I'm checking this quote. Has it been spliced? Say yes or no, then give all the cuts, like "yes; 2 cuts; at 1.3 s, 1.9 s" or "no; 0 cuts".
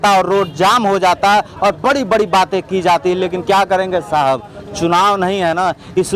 no; 0 cuts